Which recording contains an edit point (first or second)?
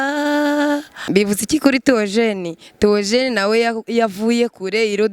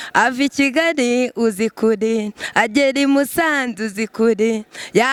first